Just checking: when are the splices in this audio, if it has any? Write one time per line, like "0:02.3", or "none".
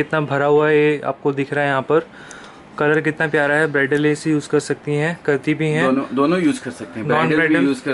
none

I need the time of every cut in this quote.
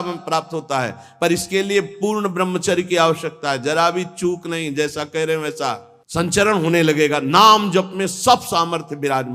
0:05.9

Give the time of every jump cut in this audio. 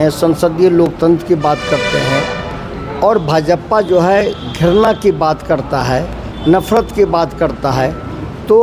none

